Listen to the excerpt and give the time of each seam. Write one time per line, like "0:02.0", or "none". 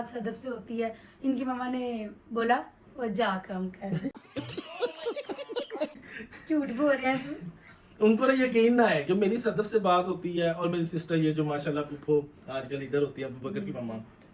none